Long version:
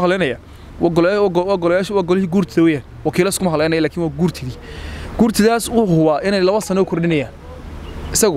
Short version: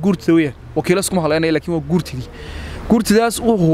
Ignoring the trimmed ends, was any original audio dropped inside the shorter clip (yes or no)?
no